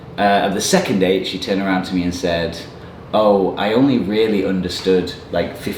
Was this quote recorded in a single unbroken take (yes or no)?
yes